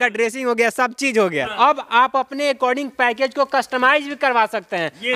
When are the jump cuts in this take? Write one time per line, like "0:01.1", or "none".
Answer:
0:01.5